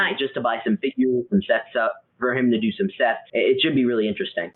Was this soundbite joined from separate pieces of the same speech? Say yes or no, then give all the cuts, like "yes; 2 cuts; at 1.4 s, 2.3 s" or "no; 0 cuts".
yes; 1 cut; at 3.2 s